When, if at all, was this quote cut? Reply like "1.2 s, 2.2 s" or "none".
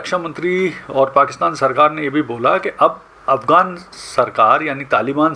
none